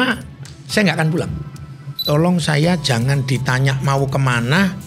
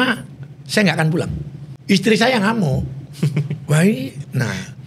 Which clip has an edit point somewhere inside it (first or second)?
first